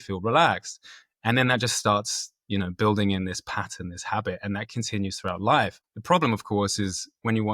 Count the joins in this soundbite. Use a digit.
1